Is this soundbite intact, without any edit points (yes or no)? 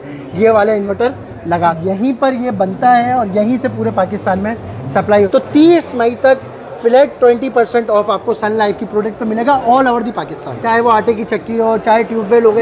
no